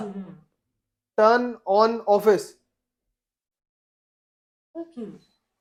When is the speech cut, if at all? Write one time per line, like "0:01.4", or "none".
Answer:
none